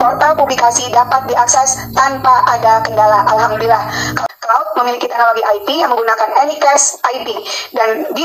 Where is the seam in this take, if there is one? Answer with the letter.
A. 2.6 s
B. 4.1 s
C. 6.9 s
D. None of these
B